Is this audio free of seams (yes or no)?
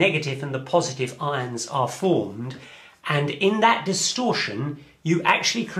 yes